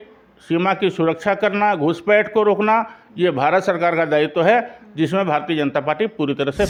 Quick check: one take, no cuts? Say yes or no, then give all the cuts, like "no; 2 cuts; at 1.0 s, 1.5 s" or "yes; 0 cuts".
yes; 0 cuts